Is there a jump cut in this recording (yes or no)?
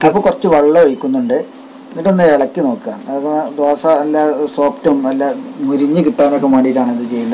no